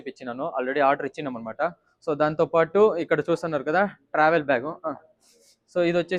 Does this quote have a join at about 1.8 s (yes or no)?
no